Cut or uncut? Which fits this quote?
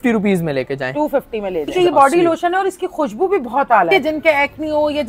cut